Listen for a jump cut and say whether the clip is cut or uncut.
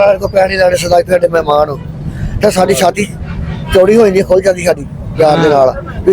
uncut